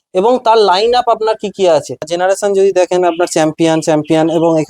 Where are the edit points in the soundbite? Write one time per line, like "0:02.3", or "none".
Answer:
0:02.1

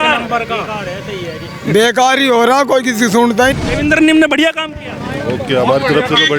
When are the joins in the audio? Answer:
0:03.5

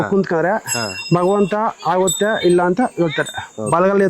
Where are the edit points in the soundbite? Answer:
none

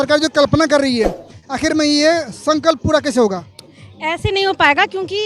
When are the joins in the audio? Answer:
none

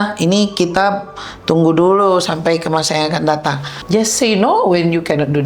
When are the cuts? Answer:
0:03.7

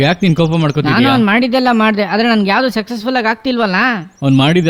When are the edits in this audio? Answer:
none

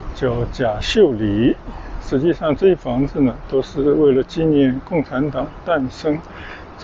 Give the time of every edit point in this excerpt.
none

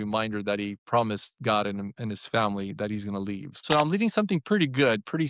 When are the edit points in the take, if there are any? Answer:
0:03.5

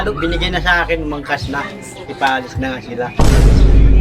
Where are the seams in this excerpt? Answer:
0:03.1

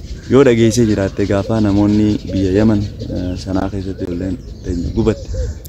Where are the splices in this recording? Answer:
0:03.6

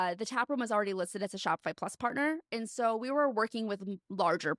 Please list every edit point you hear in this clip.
none

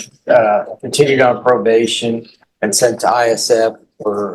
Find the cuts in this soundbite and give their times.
none

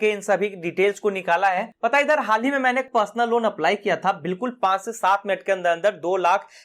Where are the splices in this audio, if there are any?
0:01.7
0:02.9

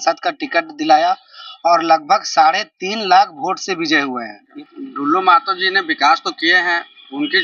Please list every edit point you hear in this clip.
0:04.5

